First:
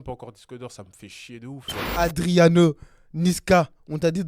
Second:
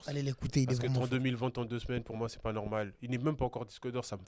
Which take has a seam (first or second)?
first